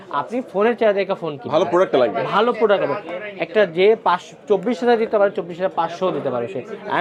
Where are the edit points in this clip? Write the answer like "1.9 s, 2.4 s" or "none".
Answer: none